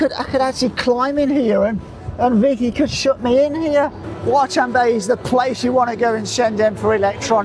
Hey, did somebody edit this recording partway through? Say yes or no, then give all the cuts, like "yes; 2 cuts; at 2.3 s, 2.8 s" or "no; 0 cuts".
yes; 1 cut; at 4.1 s